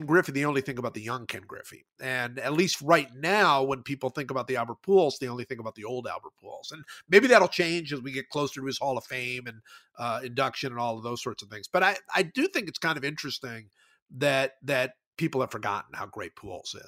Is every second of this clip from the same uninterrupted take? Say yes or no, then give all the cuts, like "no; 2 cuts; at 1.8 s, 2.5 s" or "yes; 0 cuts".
yes; 0 cuts